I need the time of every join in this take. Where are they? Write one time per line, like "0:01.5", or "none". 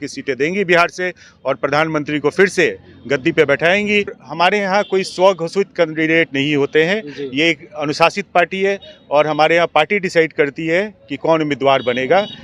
0:04.2